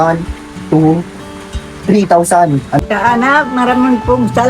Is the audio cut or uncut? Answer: cut